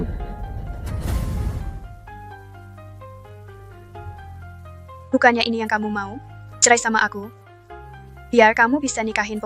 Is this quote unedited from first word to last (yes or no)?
yes